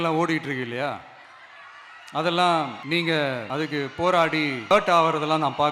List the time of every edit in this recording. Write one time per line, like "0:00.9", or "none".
0:02.8
0:03.4
0:04.7